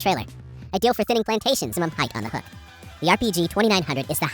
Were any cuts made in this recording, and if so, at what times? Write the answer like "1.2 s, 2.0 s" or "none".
1.7 s

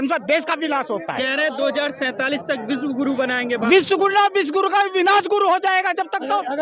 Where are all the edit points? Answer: none

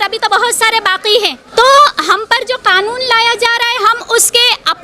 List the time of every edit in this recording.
1.4 s

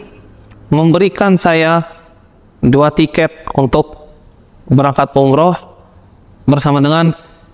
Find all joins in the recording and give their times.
none

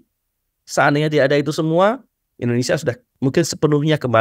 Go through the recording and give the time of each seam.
3.1 s

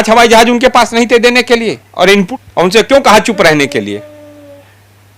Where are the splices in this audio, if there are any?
2.3 s

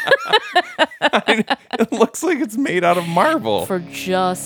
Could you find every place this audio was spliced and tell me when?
3.6 s

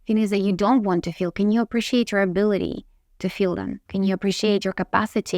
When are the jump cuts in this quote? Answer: 3.8 s

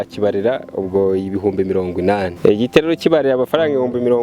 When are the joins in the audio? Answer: 2.3 s

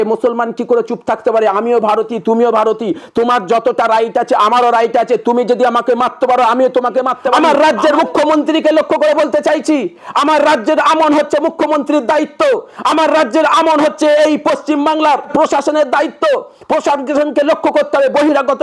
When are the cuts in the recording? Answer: 7.3 s, 15.3 s

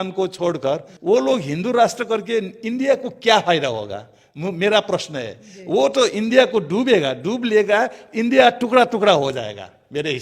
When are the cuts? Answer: none

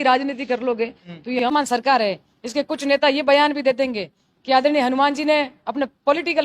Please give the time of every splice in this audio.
1.4 s

